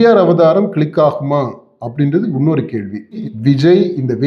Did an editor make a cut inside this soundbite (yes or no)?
yes